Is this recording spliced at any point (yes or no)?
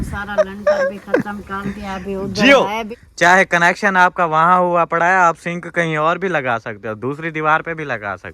yes